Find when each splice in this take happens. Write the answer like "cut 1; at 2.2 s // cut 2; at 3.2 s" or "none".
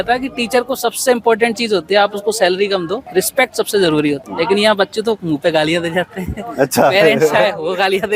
none